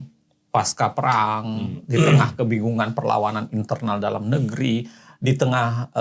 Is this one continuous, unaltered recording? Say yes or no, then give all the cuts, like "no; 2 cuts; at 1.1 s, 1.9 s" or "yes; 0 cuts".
yes; 0 cuts